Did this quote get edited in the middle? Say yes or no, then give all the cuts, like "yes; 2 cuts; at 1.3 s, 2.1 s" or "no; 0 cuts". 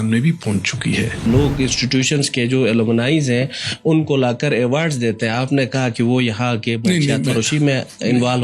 yes; 1 cut; at 1.2 s